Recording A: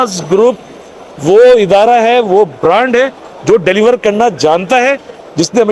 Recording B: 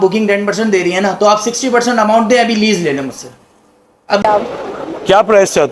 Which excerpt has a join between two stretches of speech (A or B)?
B